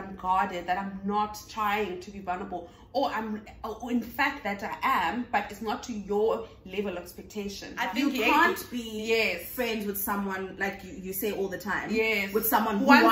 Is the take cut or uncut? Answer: cut